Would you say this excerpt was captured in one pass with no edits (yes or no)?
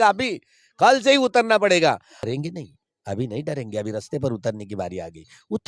no